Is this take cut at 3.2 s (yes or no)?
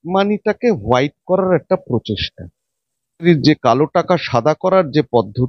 yes